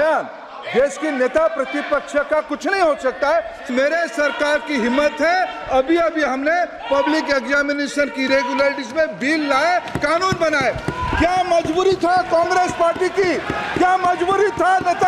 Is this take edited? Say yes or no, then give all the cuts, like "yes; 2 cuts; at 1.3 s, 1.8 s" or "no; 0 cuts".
yes; 1 cut; at 3.7 s